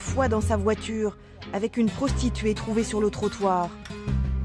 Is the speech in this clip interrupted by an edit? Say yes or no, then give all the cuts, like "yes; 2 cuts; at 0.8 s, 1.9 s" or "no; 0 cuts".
no; 0 cuts